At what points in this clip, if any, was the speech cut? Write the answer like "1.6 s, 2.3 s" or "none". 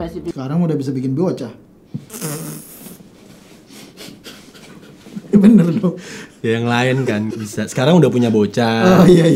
7.3 s